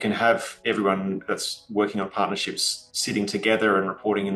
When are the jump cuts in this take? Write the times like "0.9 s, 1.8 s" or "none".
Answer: none